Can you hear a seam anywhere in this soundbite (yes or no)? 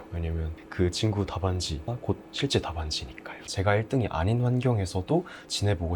yes